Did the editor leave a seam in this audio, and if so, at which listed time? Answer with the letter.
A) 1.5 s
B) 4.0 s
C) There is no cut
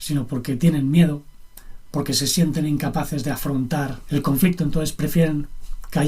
B